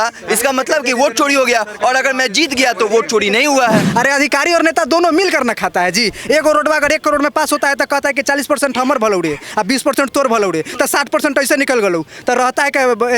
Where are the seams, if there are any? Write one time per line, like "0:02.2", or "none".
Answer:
0:03.9